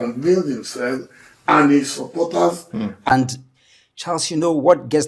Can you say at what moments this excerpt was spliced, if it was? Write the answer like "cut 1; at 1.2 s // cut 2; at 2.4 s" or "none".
cut 1; at 3.1 s